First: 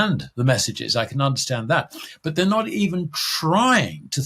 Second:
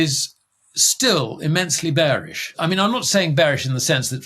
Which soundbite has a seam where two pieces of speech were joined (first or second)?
second